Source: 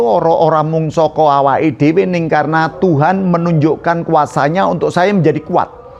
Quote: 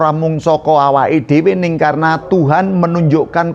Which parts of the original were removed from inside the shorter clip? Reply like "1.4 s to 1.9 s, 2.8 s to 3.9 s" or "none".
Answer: none